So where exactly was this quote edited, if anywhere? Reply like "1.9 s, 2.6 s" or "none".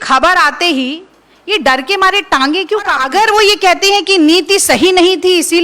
3.0 s